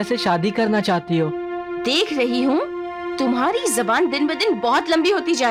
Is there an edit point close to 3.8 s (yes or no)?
no